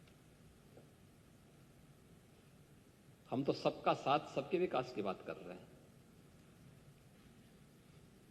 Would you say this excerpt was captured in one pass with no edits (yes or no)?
yes